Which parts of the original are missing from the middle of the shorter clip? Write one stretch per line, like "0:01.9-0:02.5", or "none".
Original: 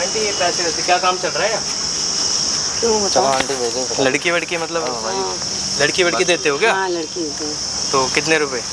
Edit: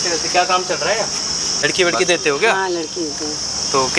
0:02.2-0:05.8

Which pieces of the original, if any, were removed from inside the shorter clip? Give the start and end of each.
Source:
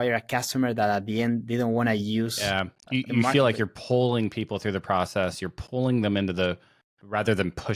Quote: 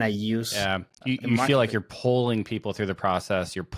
none

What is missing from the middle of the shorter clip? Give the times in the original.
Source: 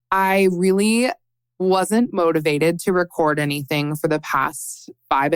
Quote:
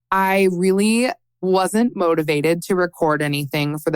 0:01.3-0:01.4

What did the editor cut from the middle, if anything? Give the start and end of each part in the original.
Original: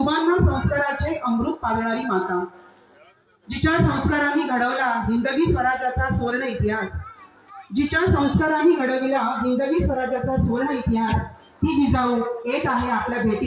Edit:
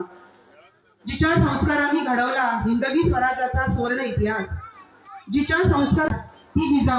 0:08.5-0:11.2

